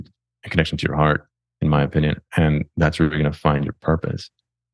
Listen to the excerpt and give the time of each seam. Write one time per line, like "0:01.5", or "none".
none